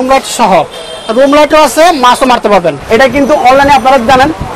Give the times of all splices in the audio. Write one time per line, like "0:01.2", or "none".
0:02.8